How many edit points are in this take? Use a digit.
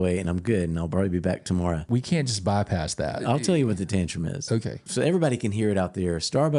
3